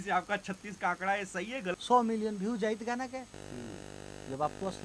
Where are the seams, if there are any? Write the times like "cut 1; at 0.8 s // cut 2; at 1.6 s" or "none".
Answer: cut 1; at 1.7 s